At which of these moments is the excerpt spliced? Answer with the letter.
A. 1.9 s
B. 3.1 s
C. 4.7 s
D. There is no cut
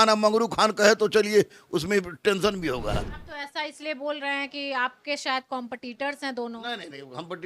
B